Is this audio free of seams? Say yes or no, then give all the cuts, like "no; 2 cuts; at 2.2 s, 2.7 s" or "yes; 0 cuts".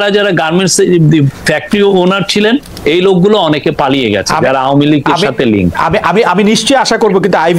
yes; 0 cuts